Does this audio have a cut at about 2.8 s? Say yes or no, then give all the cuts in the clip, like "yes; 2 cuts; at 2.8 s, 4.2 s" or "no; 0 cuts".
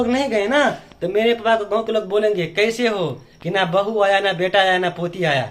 no; 0 cuts